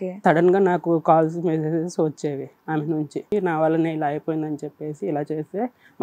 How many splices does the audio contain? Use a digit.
1